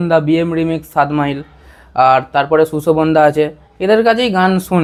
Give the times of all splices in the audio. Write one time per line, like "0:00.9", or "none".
none